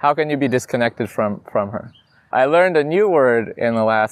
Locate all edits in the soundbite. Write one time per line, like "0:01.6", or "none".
0:02.2